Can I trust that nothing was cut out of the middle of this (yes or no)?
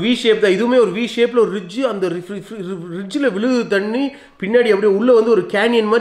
yes